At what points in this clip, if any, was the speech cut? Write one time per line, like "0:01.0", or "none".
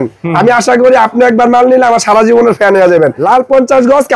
0:03.2